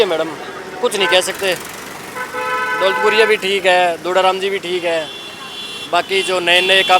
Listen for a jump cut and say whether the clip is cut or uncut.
uncut